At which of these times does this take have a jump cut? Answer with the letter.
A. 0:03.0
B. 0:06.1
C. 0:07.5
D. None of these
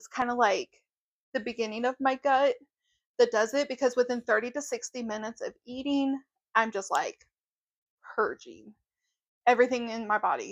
D